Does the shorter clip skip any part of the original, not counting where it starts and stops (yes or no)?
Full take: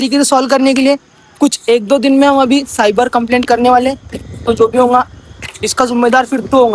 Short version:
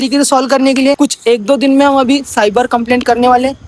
yes